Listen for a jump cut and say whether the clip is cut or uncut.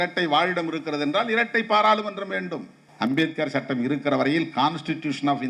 cut